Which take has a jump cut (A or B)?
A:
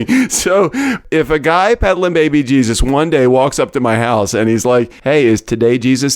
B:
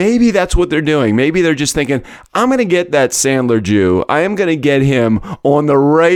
A